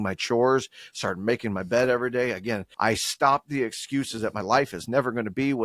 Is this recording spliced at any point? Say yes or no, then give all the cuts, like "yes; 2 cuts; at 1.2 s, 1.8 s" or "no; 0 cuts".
yes; 1 cut; at 2.7 s